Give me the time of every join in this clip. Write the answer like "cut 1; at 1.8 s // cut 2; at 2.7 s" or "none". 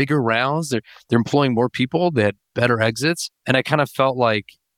cut 1; at 3.3 s